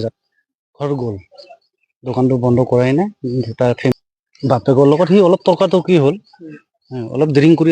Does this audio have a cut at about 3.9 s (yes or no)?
yes